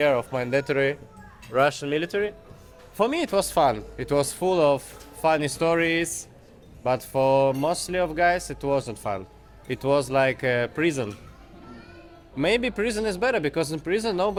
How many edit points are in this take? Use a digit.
0